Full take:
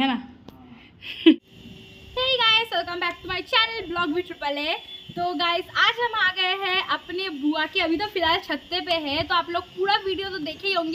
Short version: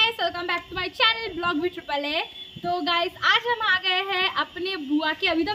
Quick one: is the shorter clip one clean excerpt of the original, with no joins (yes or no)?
yes